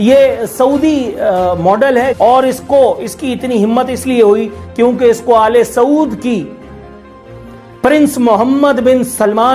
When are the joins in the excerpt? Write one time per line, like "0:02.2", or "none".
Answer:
0:02.1